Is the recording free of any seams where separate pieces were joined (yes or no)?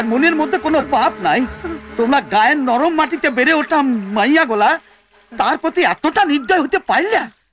yes